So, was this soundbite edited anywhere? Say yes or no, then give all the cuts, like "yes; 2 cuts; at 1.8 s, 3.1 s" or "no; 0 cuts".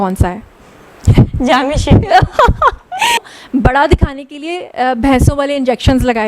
yes; 1 cut; at 3.2 s